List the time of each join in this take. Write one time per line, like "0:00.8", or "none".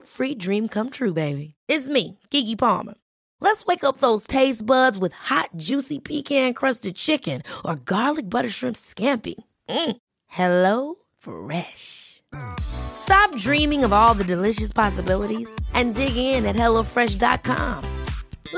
none